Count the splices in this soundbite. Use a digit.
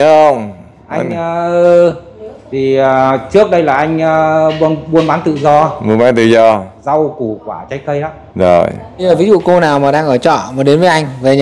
1